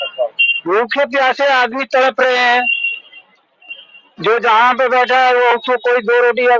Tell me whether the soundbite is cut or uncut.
uncut